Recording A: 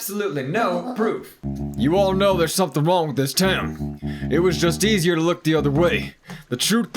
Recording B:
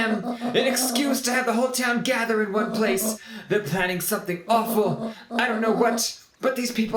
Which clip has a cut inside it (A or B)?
A